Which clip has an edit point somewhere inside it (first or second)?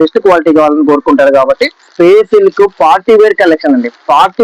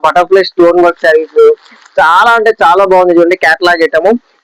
first